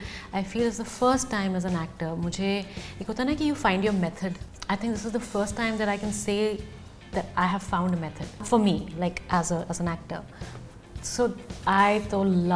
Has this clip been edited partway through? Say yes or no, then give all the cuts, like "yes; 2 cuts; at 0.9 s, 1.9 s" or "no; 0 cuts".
yes; 2 cuts; at 4.5 s, 8.4 s